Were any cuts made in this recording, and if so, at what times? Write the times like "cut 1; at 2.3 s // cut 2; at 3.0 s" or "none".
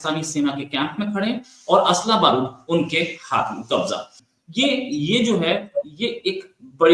cut 1; at 4.2 s